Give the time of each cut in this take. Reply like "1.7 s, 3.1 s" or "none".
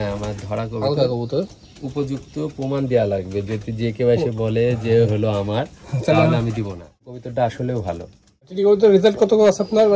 7.0 s, 8.6 s